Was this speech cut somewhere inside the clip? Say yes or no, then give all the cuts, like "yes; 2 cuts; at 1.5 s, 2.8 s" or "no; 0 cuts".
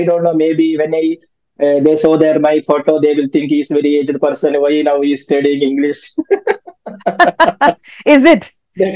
no; 0 cuts